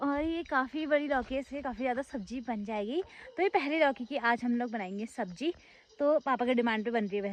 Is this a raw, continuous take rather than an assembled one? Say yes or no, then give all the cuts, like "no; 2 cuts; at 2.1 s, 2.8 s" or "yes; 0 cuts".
yes; 0 cuts